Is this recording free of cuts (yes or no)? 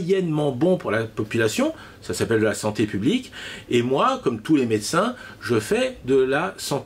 yes